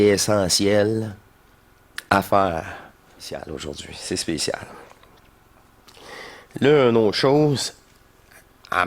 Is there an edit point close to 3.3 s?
yes; 1 cut; at 3.3 s

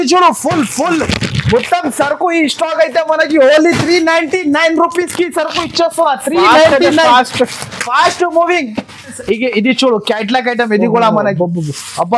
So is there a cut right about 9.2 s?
yes; 1 cut; at 9.2 s

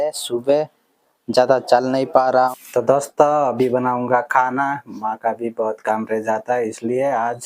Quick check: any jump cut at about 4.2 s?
no; 1 cut; at 2.5 s

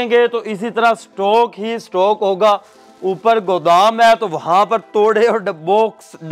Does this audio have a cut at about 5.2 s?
no; 0 cuts

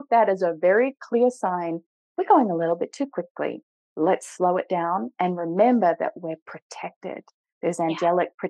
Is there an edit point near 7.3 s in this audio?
no; 0 cuts

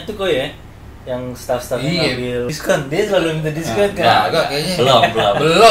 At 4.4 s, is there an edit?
no; 1 cut; at 2.5 s

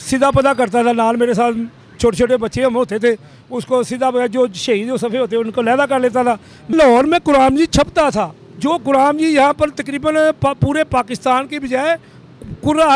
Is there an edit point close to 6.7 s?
yes; 1 cut; at 6.7 s

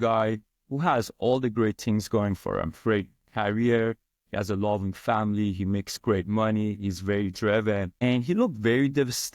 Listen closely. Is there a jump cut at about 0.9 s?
no; 0 cuts

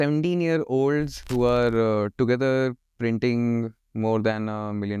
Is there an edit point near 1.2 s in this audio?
yes; 1 cut; at 1.2 s

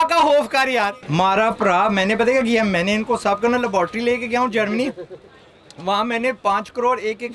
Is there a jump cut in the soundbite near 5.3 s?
no; 1 cut; at 1.0 s

